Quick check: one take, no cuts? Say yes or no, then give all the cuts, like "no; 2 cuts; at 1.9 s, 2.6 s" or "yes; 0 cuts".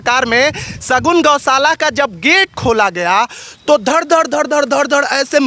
yes; 0 cuts